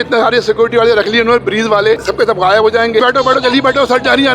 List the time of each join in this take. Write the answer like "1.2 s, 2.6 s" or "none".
2.0 s, 3.0 s

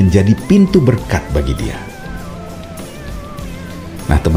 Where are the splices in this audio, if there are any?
none

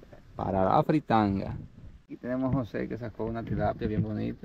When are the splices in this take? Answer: 2.0 s

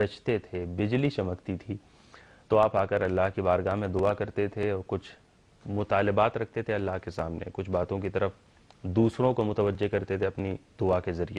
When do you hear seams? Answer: 1.7 s

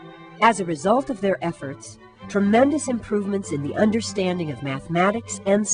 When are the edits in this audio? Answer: 3.6 s

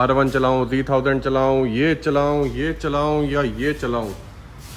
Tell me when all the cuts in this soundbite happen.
none

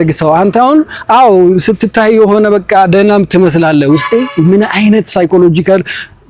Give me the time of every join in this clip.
none

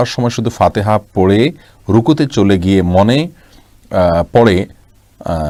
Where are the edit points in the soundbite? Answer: none

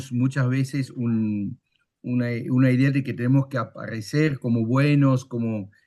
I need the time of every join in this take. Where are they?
none

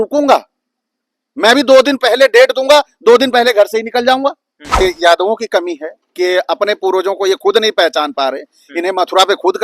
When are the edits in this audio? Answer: 4.8 s

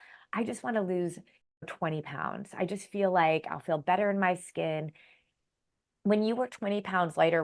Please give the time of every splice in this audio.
5.3 s

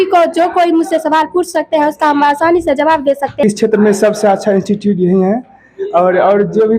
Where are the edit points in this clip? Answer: 3.4 s

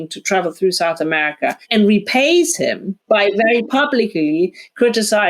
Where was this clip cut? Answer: 1.6 s, 2.9 s

